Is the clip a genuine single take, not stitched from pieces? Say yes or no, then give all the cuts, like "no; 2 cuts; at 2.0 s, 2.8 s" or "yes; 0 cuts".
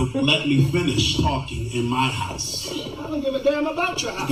yes; 0 cuts